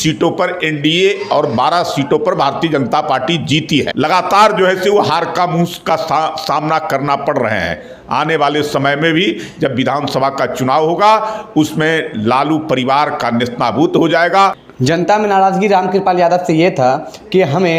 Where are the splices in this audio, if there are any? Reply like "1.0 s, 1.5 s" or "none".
3.9 s, 14.6 s